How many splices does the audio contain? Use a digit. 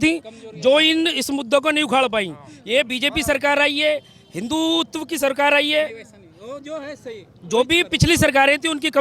0